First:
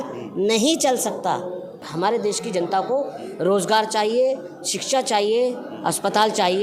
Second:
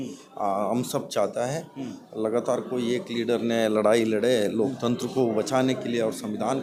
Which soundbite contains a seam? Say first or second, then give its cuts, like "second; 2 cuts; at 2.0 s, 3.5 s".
first; 1 cut; at 1.9 s